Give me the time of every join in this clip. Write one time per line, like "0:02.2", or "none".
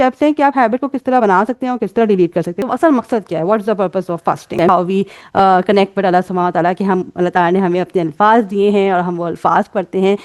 0:02.6
0:04.7